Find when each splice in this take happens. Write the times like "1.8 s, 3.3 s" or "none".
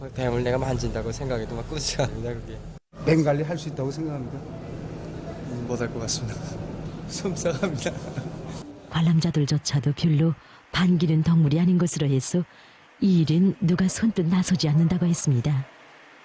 8.9 s